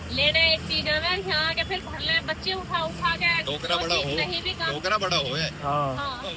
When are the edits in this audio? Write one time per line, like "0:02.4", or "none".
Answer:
none